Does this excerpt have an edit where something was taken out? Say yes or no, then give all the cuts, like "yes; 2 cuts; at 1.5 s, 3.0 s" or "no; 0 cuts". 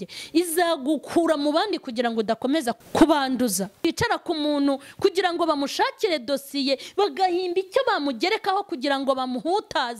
yes; 2 cuts; at 2.8 s, 3.8 s